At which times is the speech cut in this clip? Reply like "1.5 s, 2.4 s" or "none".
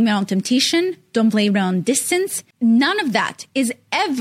2.4 s

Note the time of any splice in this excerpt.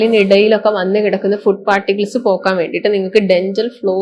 none

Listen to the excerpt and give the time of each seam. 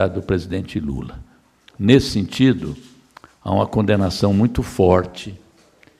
none

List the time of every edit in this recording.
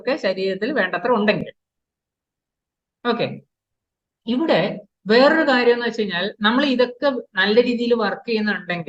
none

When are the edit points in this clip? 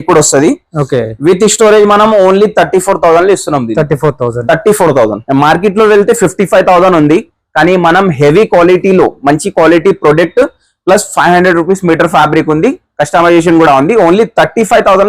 5.2 s

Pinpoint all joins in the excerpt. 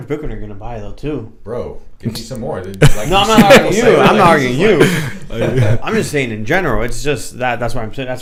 none

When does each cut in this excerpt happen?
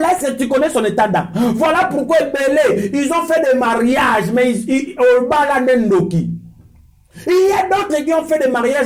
none

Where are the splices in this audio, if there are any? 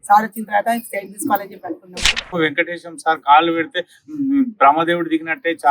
1.9 s

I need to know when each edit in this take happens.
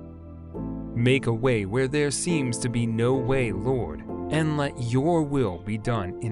1.0 s

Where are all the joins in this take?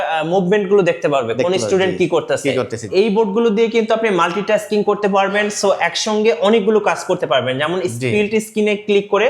2.8 s

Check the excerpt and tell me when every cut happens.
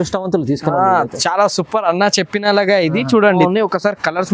3.4 s

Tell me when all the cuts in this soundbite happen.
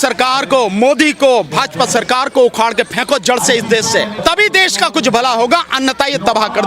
4.1 s

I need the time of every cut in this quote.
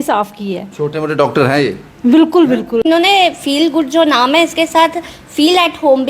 2.8 s

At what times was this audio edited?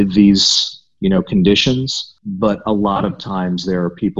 2.2 s

